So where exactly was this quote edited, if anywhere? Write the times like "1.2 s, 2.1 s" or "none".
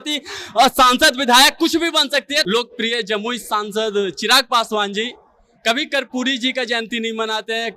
2.4 s